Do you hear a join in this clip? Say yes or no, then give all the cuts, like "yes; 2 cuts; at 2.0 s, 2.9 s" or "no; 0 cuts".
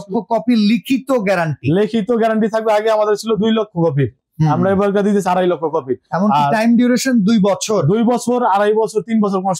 no; 0 cuts